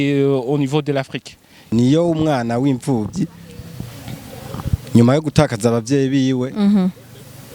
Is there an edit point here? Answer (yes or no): yes